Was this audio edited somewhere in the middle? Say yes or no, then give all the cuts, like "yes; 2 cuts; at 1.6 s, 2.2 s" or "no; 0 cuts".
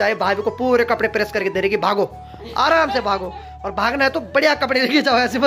no; 0 cuts